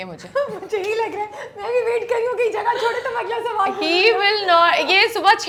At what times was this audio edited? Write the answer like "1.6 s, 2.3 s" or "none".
none